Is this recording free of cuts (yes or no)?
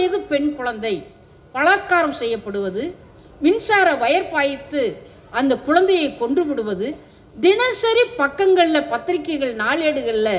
yes